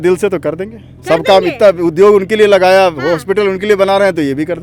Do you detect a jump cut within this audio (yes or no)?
no